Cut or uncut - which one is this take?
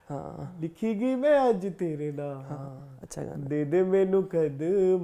cut